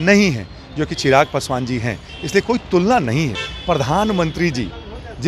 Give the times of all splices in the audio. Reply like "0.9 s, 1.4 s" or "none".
3.4 s